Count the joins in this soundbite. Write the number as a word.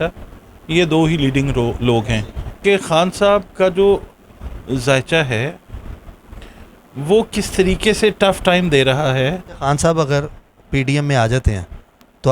two